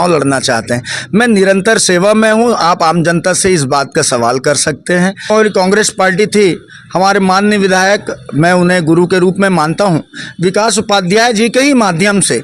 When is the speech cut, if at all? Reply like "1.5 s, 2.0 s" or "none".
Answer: 5.3 s